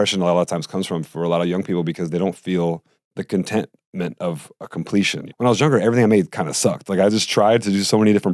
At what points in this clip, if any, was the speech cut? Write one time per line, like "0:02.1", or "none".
0:03.0
0:05.2